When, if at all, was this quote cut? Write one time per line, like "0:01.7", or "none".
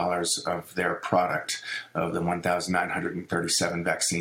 none

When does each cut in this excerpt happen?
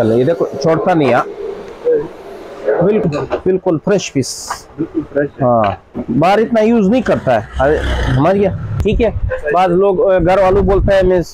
0:03.0
0:08.8

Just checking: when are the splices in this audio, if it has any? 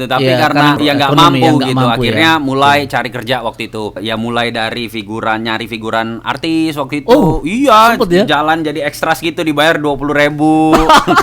0:00.8
0:04.0

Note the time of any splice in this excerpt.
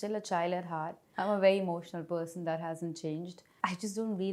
0:01.0
0:03.4

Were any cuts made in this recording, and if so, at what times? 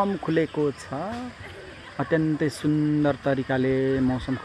none

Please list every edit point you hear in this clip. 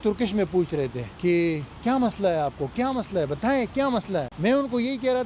0:01.0
0:04.3

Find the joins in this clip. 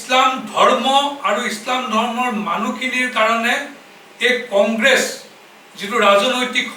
none

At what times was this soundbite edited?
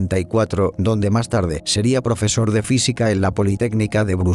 0:02.2

